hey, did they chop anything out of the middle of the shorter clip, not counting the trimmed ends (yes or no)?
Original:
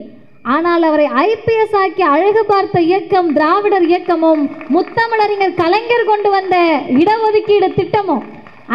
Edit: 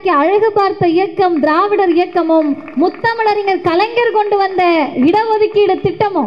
no